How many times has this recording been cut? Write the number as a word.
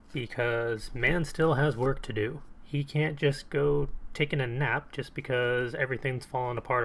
one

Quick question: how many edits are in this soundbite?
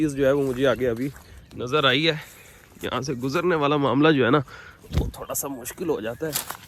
zero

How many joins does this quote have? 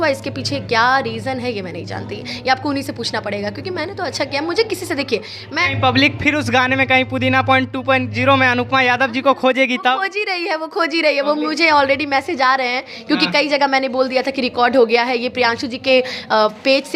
one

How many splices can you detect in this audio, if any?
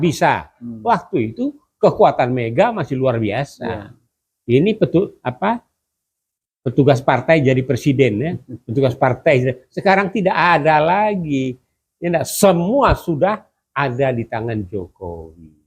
zero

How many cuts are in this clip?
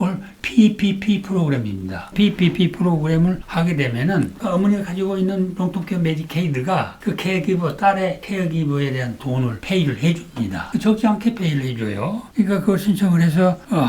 three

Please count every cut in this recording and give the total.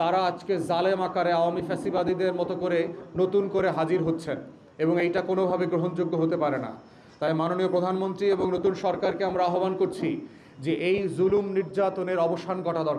zero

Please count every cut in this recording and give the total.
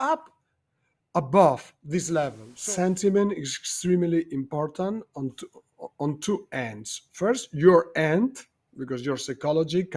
one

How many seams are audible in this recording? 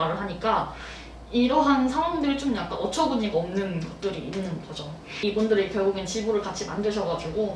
zero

